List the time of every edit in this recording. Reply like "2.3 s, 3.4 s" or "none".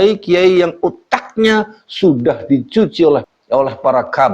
3.3 s